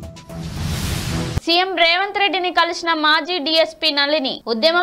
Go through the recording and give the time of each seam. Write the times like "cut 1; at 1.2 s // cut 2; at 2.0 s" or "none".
cut 1; at 1.4 s